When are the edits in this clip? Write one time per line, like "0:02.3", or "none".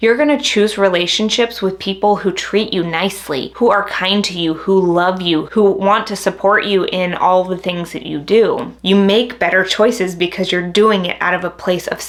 none